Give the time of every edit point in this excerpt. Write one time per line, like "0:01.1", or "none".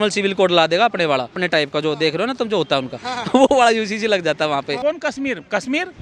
0:01.4
0:04.8